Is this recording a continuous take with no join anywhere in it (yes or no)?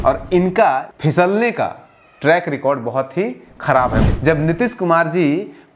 no